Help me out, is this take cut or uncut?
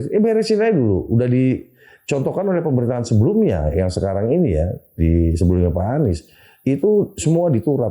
uncut